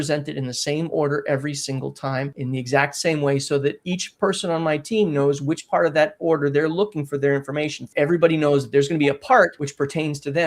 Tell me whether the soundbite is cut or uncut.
cut